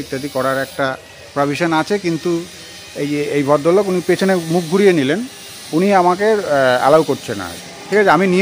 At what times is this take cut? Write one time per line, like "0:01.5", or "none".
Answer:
none